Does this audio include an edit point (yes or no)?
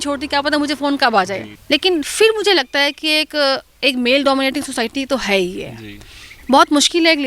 yes